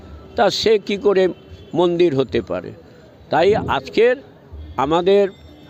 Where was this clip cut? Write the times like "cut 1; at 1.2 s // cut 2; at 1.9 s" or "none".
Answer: none